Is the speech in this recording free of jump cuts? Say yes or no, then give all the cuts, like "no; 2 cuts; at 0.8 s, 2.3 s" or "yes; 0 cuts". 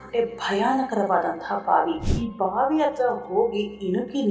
no; 1 cut; at 2.1 s